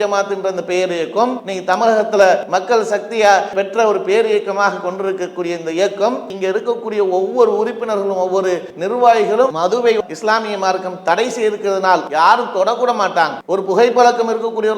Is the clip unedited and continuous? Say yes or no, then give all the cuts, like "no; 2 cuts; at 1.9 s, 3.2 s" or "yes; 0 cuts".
no; 7 cuts; at 1.5 s, 2.4 s, 6.3 s, 8.7 s, 9.5 s, 12.1 s, 13.4 s